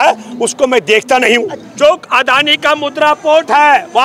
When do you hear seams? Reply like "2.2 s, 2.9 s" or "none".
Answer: 1.6 s

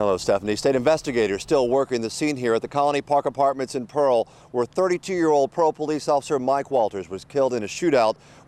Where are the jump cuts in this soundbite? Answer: none

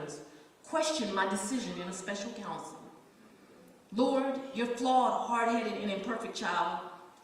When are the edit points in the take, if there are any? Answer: 3.3 s

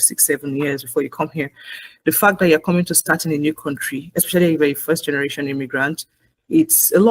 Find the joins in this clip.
none

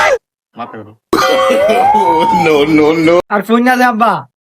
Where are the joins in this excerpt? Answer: 3.2 s

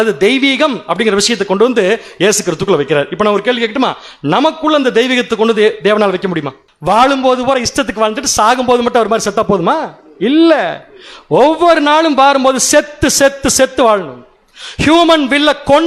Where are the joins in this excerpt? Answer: 6.7 s

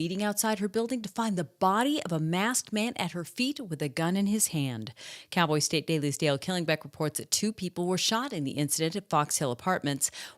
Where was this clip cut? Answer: none

